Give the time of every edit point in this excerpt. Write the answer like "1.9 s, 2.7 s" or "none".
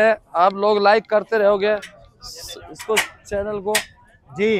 none

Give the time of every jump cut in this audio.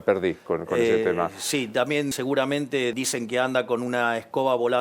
2.1 s, 2.9 s

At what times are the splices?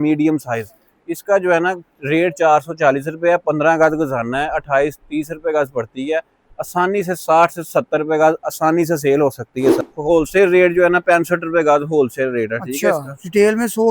9.8 s

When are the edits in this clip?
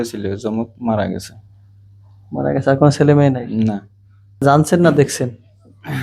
4.4 s

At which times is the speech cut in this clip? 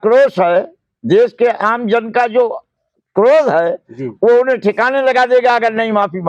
none

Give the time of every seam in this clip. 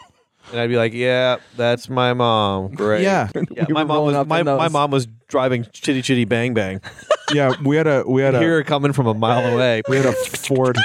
3.3 s

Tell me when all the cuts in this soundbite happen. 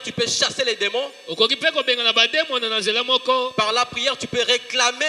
none

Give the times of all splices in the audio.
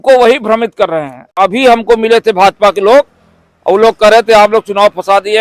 1.2 s

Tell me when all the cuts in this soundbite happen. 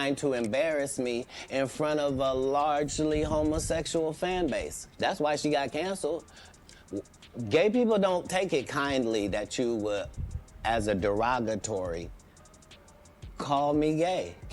1.2 s

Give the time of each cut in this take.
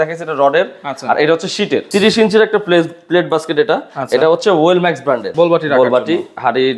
1.9 s, 5.3 s

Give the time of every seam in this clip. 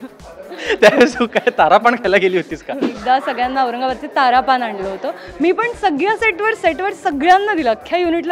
2.9 s

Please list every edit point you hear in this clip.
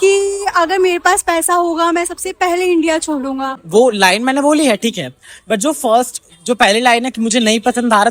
3.6 s

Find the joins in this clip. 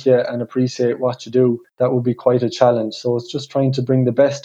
1.7 s

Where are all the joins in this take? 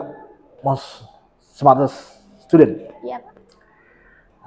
none

